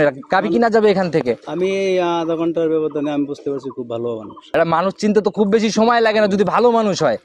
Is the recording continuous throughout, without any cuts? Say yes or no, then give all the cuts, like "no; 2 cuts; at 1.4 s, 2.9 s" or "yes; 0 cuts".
no; 1 cut; at 4.4 s